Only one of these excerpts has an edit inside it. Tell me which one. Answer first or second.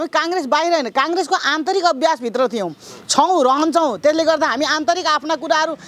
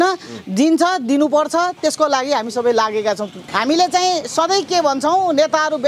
second